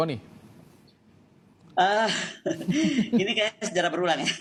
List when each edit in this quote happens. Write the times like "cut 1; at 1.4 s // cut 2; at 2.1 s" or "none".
none